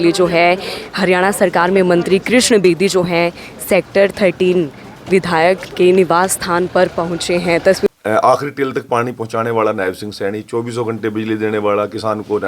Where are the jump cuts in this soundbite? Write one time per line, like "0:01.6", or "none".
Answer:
0:07.9